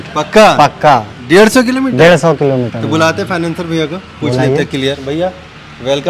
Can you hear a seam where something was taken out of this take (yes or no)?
no